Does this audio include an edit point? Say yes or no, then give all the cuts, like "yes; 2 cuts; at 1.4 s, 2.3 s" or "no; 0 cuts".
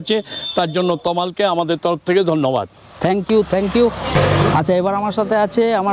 yes; 1 cut; at 3.9 s